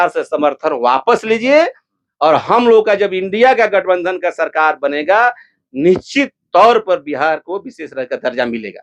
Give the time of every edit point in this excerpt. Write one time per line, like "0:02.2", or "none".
none